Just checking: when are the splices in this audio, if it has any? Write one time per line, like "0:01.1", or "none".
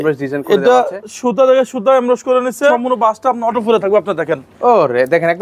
0:02.8

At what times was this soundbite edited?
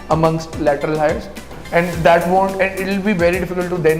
0:01.4

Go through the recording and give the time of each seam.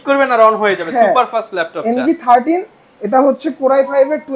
none

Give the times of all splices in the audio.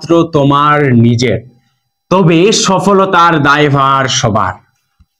none

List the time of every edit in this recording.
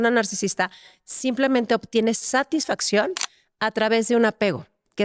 none

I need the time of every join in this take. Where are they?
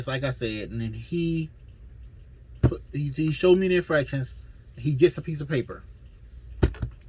none

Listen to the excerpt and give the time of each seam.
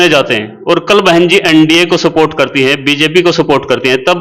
none

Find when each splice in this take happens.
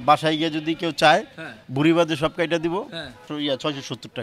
0:03.3

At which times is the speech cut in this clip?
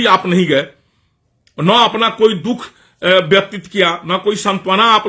none

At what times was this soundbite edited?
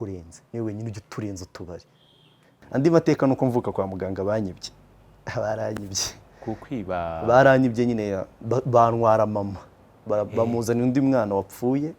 0:02.4

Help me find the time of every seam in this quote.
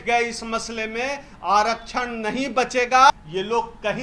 0:03.1

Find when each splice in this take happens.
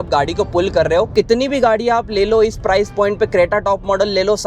0:01.1

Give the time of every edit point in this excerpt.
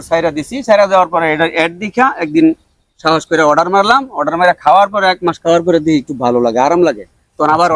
none

